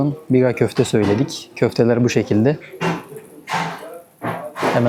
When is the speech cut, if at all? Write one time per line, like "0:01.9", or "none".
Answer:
none